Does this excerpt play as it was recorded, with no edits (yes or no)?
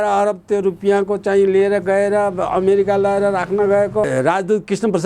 no